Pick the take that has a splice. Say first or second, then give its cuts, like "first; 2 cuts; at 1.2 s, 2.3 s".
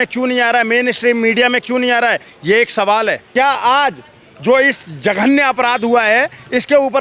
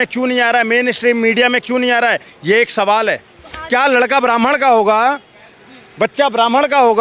first; 1 cut; at 3.2 s